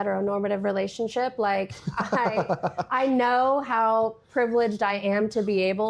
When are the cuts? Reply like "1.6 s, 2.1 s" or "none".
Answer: none